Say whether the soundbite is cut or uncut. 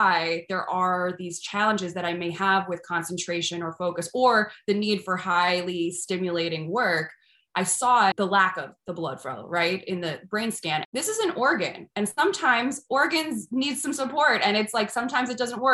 cut